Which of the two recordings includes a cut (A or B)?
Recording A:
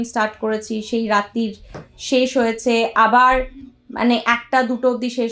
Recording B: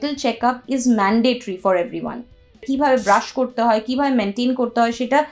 B